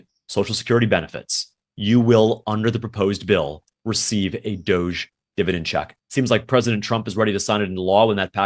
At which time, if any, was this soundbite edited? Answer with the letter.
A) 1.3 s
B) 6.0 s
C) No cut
B